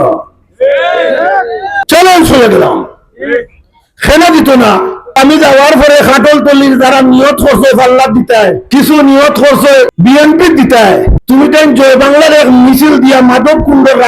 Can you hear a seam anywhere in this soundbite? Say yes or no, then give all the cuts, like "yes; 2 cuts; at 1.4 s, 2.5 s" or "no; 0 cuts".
yes; 5 cuts; at 1.8 s, 5.2 s, 8.6 s, 9.9 s, 11.1 s